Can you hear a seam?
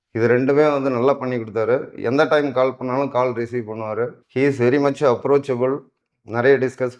no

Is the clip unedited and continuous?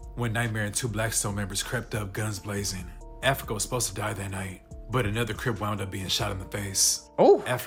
yes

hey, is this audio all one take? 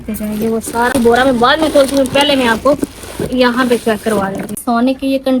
no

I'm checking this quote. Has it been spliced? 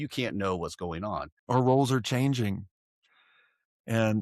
yes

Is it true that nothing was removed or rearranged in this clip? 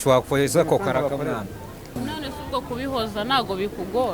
no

